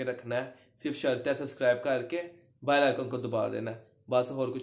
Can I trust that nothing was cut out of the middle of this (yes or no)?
yes